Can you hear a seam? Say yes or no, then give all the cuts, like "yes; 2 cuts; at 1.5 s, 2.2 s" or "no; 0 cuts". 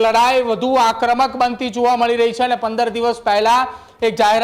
no; 0 cuts